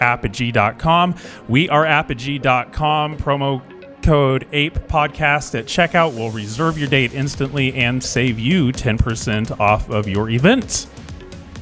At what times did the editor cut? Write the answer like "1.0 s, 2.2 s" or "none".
10.7 s